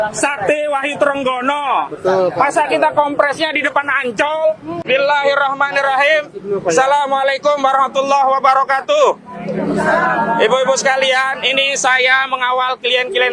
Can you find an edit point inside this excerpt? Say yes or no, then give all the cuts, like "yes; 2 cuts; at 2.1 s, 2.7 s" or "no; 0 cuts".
no; 0 cuts